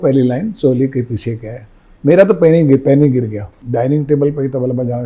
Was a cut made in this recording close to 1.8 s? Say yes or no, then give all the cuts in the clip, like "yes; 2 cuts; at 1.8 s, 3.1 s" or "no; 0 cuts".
no; 1 cut; at 3.6 s